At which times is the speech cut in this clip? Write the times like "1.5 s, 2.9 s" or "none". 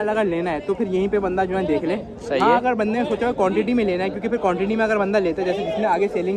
none